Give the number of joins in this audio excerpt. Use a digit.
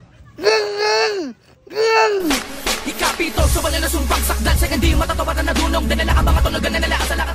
0